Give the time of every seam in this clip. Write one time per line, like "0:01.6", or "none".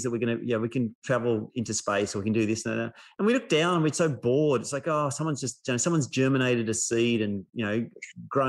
0:01.1